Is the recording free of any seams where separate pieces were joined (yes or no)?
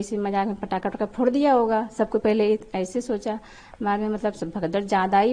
yes